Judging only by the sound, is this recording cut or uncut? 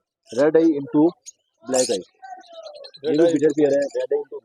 uncut